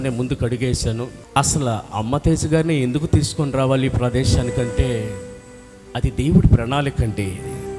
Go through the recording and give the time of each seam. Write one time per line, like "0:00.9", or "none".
0:01.2